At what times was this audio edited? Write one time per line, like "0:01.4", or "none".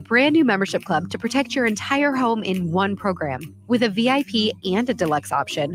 none